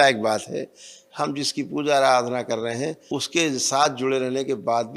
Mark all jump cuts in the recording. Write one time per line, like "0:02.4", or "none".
0:03.0